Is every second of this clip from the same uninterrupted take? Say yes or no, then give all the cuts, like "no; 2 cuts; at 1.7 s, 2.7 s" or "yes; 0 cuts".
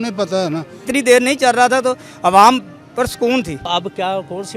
no; 2 cuts; at 0.9 s, 3.7 s